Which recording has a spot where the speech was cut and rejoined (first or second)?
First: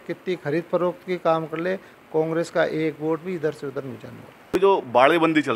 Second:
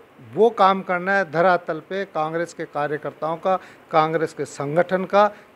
first